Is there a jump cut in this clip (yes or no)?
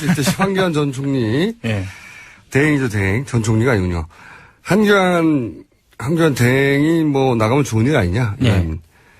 yes